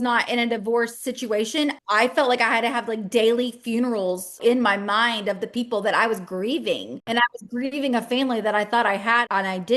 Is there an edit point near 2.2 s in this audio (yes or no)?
no